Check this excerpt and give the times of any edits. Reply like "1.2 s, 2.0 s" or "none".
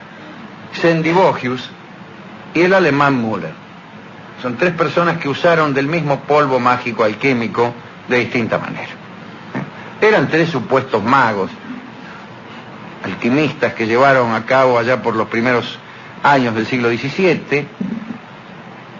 1.5 s